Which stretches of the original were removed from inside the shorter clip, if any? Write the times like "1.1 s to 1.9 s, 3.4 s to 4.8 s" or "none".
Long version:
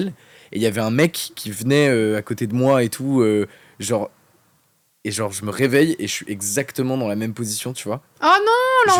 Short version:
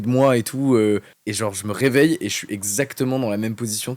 3.6 s to 5.0 s